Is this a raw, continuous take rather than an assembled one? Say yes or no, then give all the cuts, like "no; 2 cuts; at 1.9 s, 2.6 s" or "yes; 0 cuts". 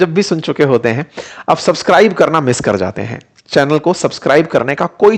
yes; 0 cuts